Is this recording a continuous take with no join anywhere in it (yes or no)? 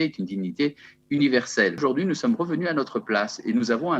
no